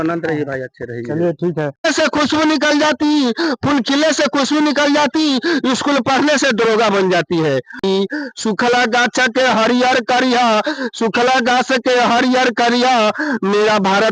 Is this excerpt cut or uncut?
cut